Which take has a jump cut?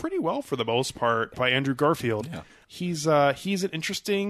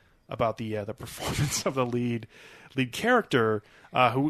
first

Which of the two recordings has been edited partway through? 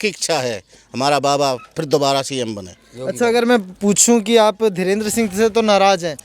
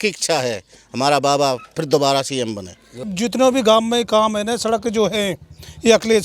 second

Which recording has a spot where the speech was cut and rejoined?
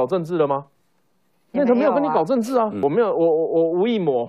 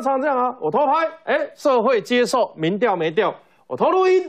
first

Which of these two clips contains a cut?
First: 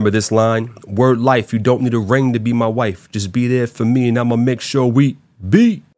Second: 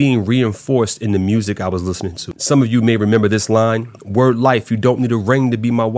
second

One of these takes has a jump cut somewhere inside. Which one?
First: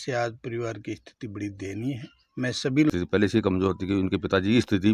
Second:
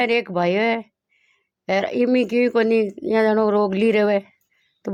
first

